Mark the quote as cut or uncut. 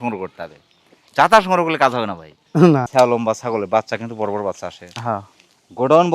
cut